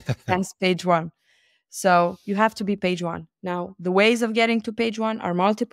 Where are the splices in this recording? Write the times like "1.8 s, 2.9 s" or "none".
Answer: none